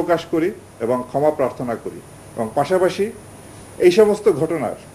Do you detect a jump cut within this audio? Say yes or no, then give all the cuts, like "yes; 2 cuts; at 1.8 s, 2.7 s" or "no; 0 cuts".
no; 0 cuts